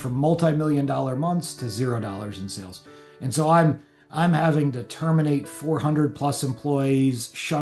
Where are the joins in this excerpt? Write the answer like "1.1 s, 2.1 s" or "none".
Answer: none